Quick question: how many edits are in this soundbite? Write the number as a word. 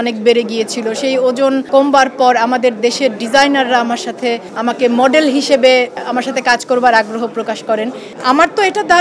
three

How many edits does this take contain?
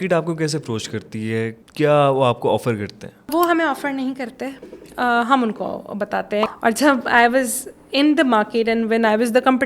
three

